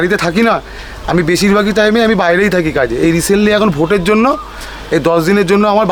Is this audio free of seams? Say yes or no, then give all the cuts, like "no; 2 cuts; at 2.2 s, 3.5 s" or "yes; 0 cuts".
yes; 0 cuts